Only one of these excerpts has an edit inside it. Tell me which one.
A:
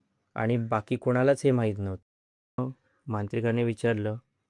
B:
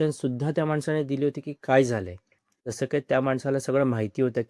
A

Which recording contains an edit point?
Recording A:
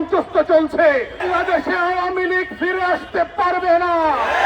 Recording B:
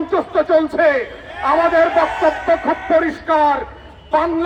A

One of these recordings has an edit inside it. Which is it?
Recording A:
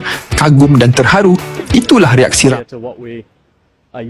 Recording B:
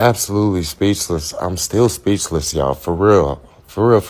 A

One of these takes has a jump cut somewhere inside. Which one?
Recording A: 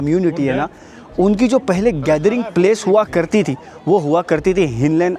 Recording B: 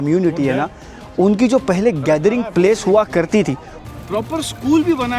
B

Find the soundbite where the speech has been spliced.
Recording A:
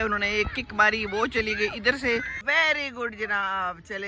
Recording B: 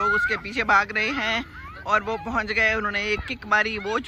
A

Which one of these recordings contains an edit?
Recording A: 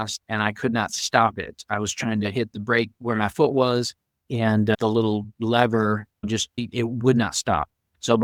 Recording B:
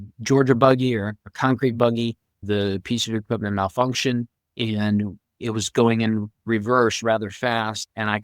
B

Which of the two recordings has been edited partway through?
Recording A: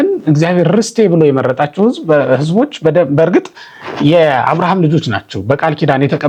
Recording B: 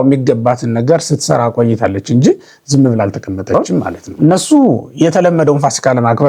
B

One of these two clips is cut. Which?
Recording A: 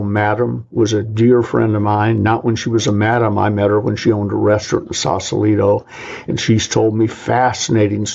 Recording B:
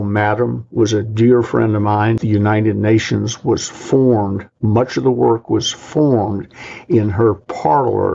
B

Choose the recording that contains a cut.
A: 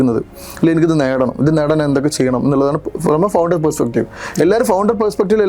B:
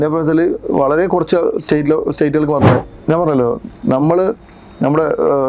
B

